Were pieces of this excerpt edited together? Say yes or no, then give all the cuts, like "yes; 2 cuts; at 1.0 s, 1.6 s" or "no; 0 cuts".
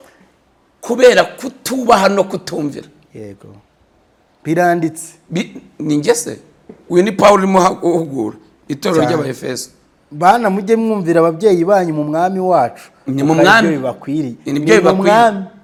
no; 0 cuts